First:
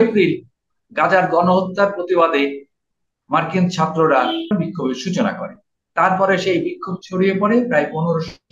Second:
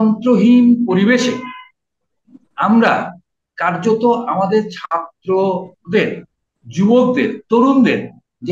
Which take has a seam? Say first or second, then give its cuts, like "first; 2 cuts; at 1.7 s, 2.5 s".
first; 1 cut; at 4.5 s